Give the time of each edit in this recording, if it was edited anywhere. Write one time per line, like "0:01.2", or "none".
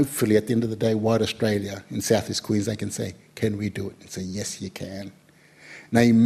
none